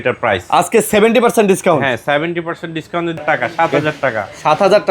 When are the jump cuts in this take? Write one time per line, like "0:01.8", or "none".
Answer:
0:03.2